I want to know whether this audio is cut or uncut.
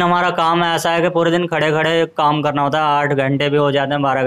uncut